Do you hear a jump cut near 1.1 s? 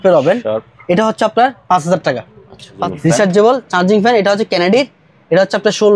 no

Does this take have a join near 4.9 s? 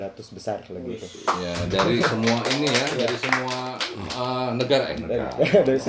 no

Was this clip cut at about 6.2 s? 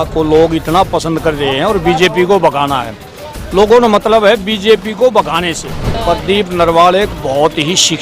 yes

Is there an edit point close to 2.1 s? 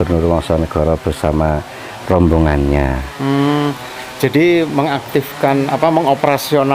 no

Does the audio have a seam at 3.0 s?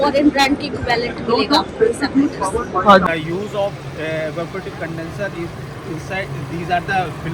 yes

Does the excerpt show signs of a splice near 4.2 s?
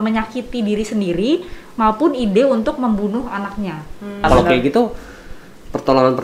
yes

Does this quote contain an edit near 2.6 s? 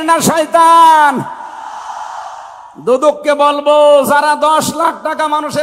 no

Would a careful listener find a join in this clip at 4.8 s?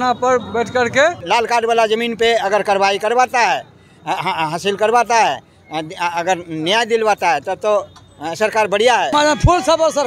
no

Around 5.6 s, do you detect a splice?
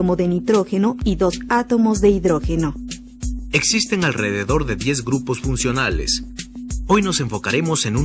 yes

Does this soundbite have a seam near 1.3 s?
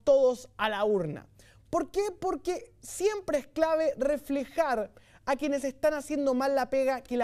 no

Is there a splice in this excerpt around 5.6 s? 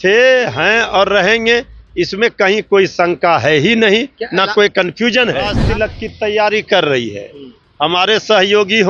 yes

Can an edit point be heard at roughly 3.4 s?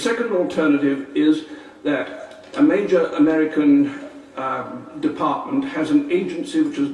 no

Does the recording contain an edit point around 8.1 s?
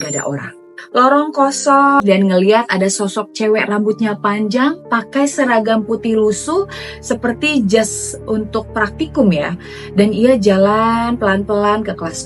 no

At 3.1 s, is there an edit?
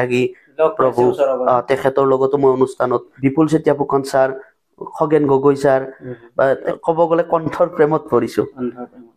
yes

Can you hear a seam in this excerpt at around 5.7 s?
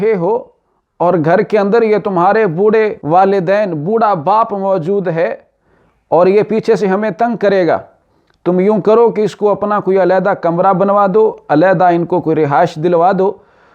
no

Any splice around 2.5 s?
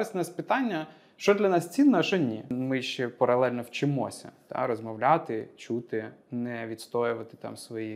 yes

